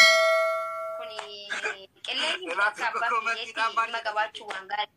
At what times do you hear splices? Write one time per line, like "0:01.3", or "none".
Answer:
0:01.2